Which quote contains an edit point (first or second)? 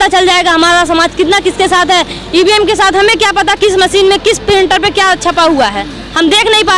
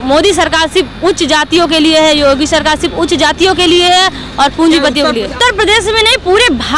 second